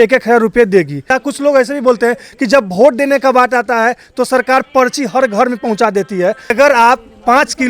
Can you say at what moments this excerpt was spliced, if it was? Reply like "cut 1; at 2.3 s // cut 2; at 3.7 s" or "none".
cut 1; at 1.1 s // cut 2; at 6.5 s